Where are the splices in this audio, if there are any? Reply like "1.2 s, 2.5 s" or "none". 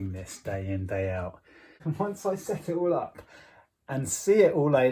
1.8 s